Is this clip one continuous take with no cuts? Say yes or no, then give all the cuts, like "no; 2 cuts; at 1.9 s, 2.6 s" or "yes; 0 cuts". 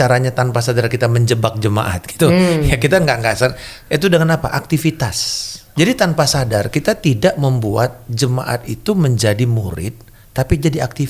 no; 1 cut; at 5.7 s